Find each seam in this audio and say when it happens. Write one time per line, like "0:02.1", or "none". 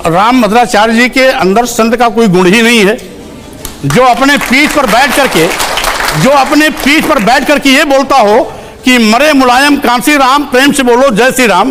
none